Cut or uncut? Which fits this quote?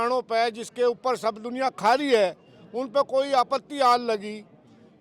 uncut